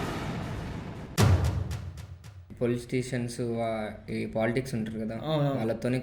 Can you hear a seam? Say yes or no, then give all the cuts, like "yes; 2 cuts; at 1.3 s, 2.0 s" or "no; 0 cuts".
yes; 1 cut; at 2.4 s